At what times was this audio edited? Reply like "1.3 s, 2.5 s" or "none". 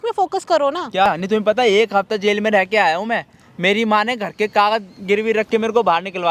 1.1 s

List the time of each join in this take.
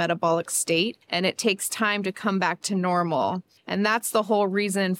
1.0 s, 3.5 s

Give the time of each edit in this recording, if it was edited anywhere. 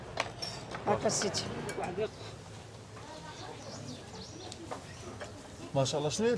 2.1 s

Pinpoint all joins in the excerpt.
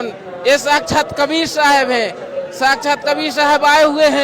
none

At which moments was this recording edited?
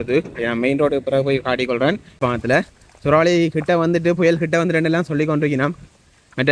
2.2 s

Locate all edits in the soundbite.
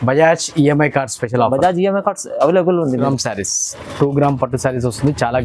2.9 s

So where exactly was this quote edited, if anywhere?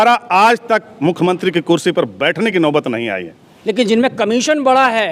3.5 s

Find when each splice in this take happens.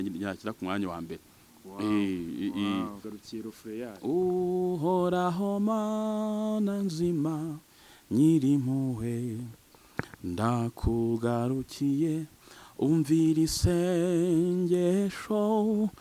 3.1 s

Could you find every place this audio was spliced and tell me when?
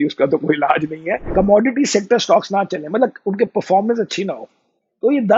1.2 s

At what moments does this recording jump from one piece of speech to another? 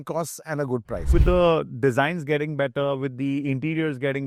1.1 s

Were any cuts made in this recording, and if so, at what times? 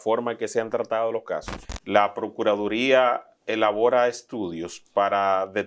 1.6 s

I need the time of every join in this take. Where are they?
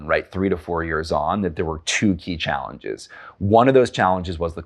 none

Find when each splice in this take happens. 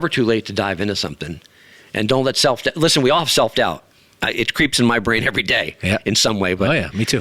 none

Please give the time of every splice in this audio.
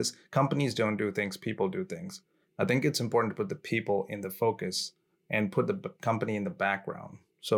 none

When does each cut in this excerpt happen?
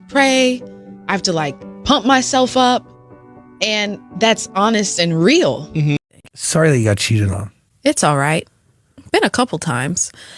6.0 s

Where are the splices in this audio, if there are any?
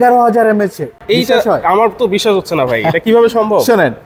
none

